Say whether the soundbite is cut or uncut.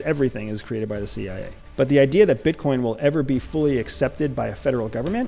cut